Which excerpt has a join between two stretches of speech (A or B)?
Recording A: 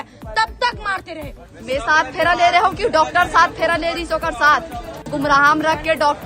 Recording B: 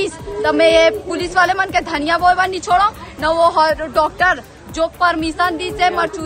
A